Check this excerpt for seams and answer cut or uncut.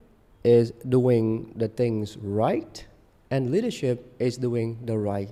uncut